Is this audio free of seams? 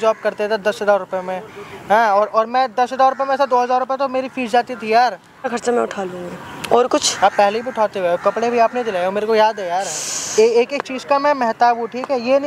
yes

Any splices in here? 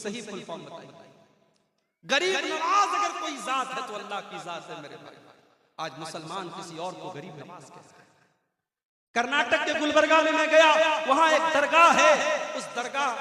no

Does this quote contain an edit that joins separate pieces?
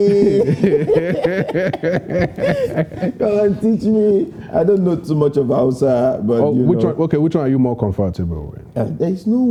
no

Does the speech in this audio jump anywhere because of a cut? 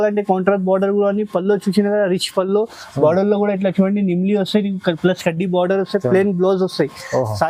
no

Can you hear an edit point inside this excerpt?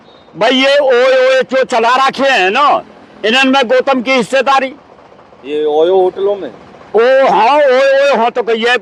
no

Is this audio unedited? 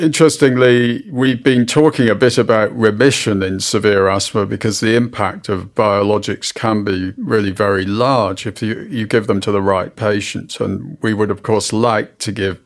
no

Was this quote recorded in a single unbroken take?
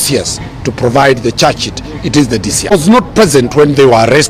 no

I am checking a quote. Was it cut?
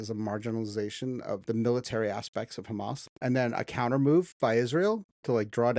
yes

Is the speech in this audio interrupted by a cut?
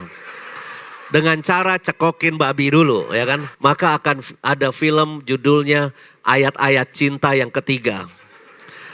yes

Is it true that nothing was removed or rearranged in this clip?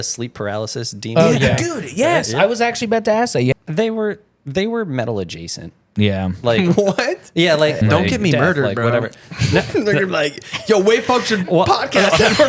no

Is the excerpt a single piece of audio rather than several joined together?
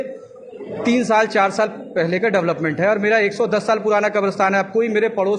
yes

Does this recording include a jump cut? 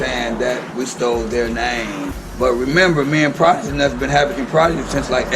yes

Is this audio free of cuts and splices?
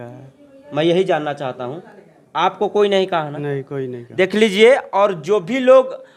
yes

